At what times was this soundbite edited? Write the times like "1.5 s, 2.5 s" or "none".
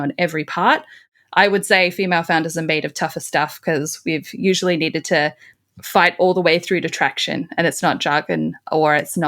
1.0 s